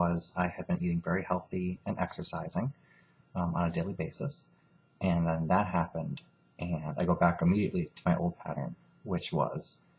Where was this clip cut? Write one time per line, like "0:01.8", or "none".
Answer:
0:05.2